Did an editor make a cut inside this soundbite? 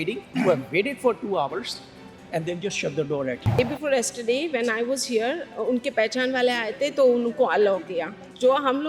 yes; 1 cut; at 3.6 s

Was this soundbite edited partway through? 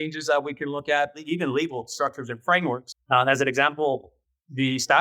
yes; 2 cuts; at 1.2 s, 2.9 s

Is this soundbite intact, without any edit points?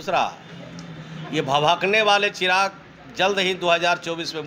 yes; 0 cuts

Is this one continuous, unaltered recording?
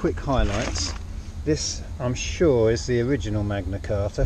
yes; 0 cuts

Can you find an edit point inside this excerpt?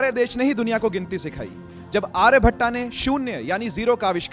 no; 0 cuts

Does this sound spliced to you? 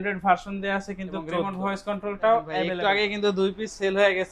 yes; 2 cuts; at 1.5 s, 2.7 s

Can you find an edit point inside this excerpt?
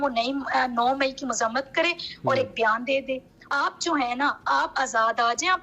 yes; 1 cut; at 3.5 s

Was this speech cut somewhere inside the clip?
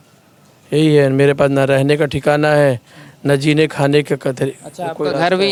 no; 0 cuts

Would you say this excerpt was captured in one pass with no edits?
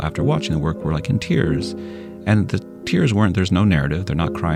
yes; 0 cuts

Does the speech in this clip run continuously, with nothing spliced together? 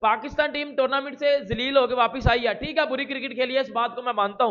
yes; 0 cuts

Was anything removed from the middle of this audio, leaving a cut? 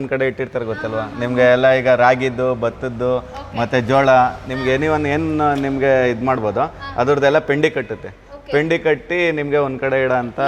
no; 0 cuts

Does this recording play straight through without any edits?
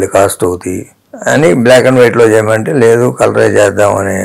yes; 0 cuts

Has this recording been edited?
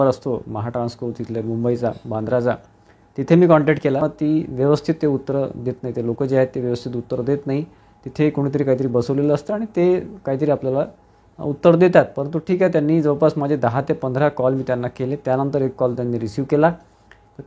no; 0 cuts

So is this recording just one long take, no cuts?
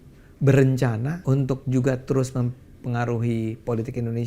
no; 1 cut; at 1.1 s

